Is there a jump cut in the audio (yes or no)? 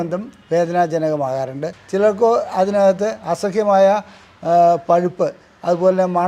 yes